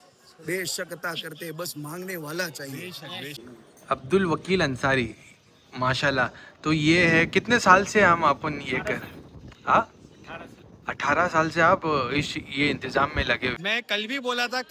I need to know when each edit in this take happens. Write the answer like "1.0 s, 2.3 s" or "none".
3.5 s, 13.6 s